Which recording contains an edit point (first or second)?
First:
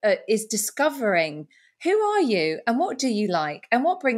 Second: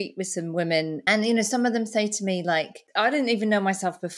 second